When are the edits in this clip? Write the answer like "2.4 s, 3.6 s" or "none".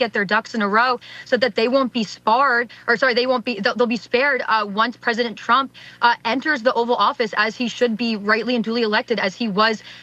none